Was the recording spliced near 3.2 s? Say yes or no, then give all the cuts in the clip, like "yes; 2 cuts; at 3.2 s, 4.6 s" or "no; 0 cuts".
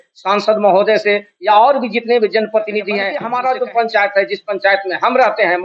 yes; 1 cut; at 3.2 s